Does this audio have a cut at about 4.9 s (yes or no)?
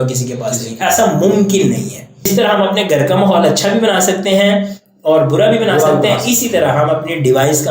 no